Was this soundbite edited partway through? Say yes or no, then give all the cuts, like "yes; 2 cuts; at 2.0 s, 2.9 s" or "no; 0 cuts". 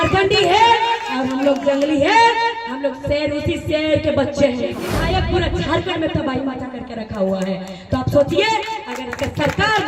yes; 1 cut; at 5.0 s